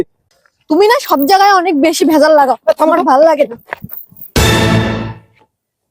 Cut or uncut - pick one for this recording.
uncut